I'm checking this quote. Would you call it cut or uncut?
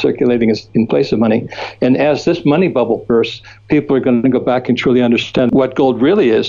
cut